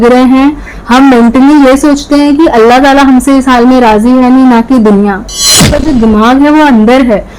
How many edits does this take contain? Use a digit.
1